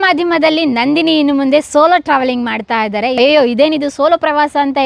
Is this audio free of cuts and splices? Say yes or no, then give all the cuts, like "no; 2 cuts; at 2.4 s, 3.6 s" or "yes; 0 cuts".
no; 1 cut; at 3.1 s